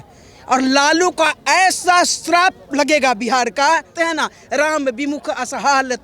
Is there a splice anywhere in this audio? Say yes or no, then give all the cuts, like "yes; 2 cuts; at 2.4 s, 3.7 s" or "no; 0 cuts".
yes; 1 cut; at 3.9 s